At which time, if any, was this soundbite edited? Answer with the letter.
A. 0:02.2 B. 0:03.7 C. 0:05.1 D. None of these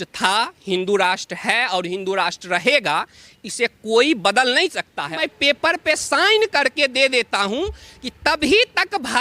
C